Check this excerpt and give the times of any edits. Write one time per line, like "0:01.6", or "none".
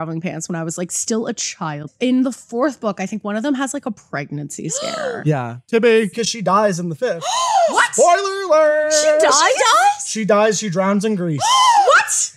0:01.8
0:06.1